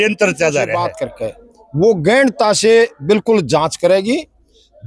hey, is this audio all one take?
no; 1 cut; at 1.0 s

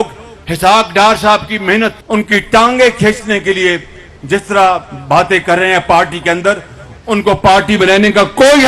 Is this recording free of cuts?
no; 1 cut; at 2.0 s

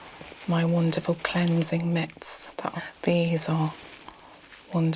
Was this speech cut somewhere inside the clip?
yes; 1 cut; at 2.7 s

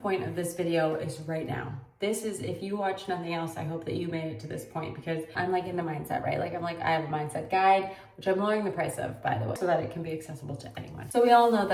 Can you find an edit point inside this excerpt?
no; 0 cuts

